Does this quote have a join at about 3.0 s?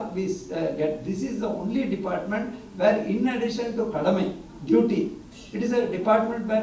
no; 0 cuts

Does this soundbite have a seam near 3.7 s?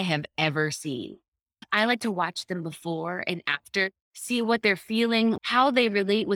no; 2 cuts; at 1.6 s, 5.4 s

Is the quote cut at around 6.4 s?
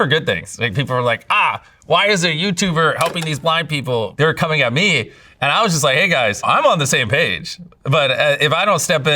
yes; 2 cuts; at 4.1 s, 6.4 s

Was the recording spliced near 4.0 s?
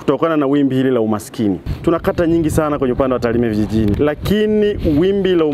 yes; 2 cuts; at 1.7 s, 4.0 s

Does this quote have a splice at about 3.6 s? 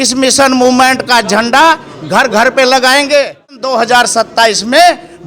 yes; 1 cut; at 3.6 s

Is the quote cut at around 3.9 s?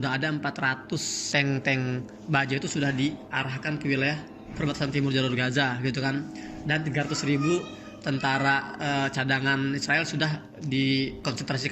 no; 1 cut; at 1.2 s

